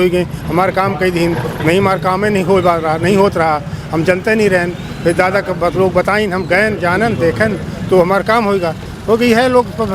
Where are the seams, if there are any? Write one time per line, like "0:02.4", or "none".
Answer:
none